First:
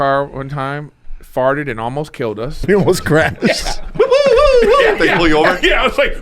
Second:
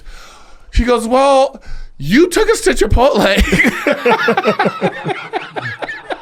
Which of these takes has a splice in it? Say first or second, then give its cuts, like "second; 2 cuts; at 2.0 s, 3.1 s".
first; 1 cut; at 2.6 s